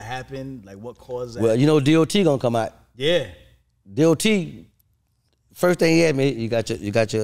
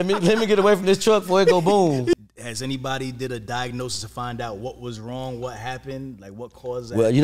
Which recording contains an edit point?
second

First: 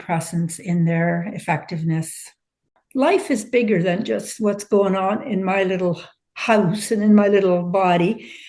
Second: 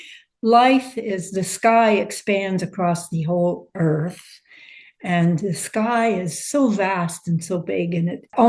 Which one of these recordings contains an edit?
first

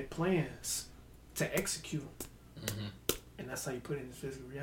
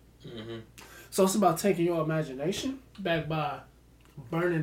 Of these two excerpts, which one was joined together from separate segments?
second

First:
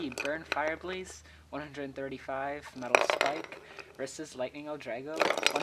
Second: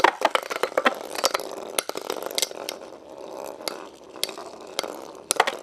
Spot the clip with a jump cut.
second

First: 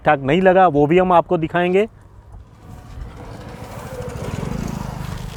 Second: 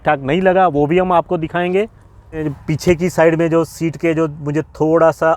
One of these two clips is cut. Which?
second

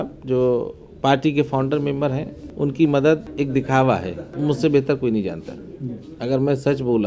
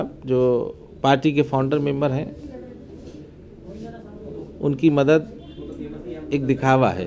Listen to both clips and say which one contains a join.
first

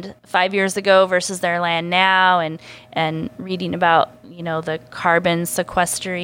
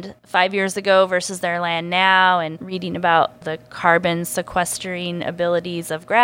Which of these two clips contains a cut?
second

